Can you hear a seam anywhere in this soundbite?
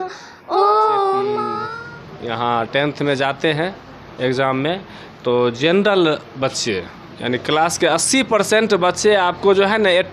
yes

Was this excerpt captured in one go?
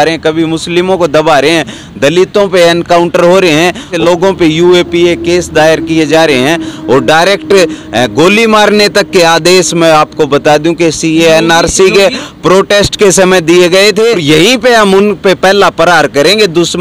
no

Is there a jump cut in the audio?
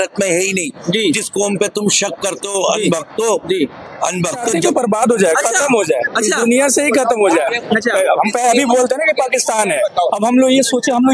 yes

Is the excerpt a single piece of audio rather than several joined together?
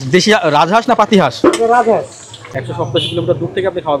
no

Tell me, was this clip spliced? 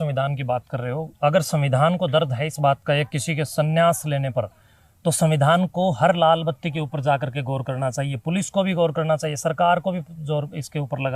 no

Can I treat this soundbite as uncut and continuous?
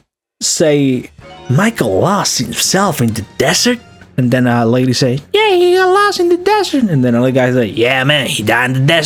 yes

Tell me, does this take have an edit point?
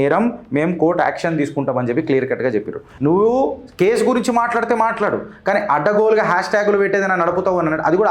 yes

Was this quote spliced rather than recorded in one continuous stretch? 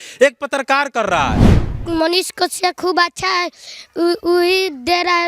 yes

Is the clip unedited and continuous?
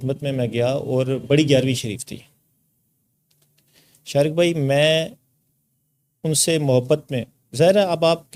yes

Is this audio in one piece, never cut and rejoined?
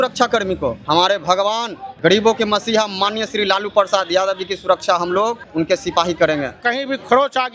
no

